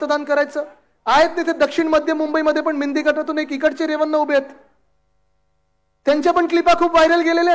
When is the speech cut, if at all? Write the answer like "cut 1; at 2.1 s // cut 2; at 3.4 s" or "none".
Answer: none